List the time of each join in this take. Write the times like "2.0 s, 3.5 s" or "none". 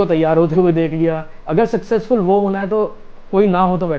1.3 s